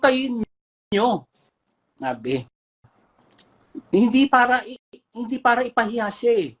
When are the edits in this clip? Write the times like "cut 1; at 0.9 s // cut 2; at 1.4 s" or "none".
none